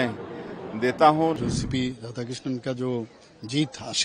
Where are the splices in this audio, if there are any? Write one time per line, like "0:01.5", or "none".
0:01.4